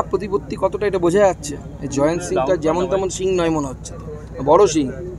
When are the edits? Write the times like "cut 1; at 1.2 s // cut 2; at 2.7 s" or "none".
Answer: none